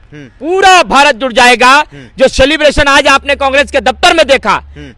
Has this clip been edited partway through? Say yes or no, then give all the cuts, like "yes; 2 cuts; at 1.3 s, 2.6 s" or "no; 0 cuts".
no; 0 cuts